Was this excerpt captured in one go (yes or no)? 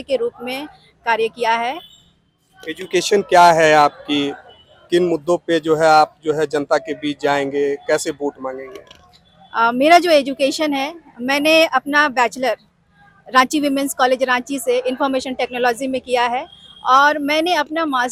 yes